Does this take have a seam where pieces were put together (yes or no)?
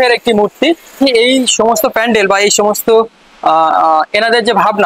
yes